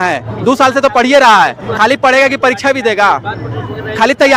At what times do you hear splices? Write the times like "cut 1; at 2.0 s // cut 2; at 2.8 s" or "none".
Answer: none